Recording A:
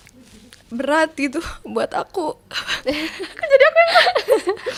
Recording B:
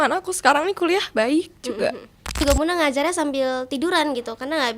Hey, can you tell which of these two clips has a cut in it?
B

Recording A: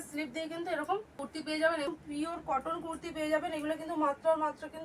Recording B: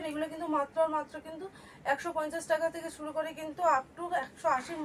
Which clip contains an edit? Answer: A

